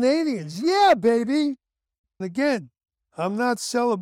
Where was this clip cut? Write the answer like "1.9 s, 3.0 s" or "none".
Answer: 2.1 s